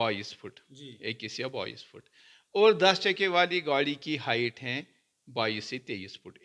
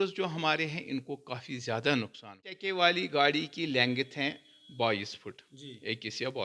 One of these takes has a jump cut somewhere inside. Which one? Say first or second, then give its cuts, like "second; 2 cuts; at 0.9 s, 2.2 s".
second; 1 cut; at 2.6 s